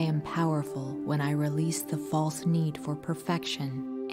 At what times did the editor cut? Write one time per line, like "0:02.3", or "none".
none